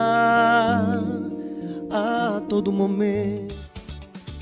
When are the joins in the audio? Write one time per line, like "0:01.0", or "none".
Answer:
0:03.4